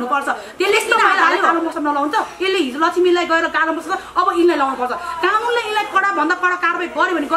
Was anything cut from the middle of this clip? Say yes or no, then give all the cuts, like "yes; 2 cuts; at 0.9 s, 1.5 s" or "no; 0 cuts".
yes; 1 cut; at 1.5 s